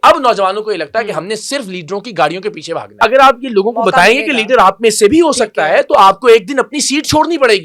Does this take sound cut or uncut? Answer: cut